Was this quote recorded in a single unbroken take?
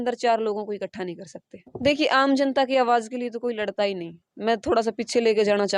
no; 1 cut; at 1.8 s

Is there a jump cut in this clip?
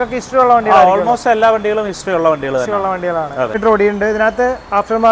yes; 1 cut; at 3.6 s

